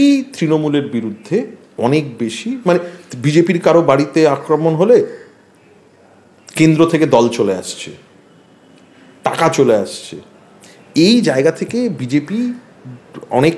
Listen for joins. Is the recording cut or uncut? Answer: uncut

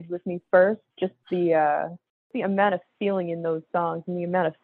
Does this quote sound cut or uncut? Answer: cut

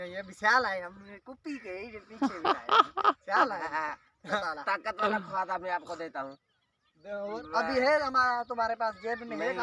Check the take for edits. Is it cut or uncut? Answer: cut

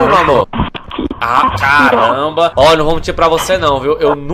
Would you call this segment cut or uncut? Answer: cut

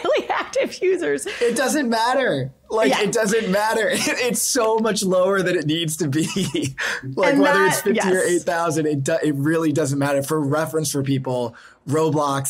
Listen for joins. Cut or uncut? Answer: cut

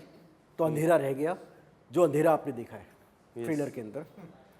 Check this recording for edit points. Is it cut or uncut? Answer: uncut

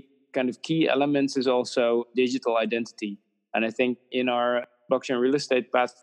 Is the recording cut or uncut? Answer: cut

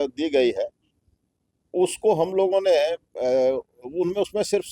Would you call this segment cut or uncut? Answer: uncut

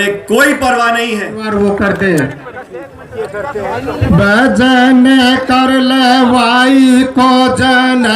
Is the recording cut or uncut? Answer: cut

